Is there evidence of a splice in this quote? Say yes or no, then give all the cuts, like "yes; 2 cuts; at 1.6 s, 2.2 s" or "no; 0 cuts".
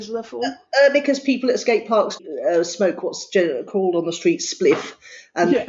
yes; 1 cut; at 2.1 s